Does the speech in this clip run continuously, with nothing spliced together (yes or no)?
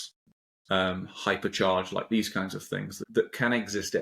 yes